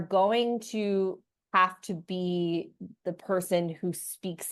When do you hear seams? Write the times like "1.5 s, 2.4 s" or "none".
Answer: none